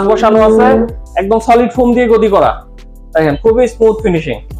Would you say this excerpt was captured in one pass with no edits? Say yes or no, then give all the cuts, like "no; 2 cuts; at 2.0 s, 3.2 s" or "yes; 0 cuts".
no; 1 cut; at 2.8 s